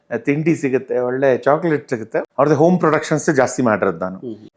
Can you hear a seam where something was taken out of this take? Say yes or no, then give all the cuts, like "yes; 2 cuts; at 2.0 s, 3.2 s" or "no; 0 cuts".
yes; 1 cut; at 2.2 s